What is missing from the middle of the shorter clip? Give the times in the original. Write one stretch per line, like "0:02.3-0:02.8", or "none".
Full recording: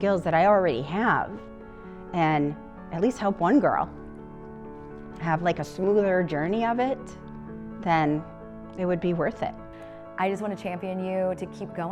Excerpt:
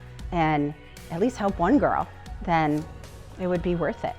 0:04.1-0:07.6